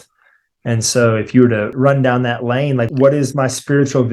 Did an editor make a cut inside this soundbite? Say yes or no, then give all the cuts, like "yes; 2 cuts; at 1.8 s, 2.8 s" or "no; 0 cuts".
yes; 2 cuts; at 1.7 s, 2.9 s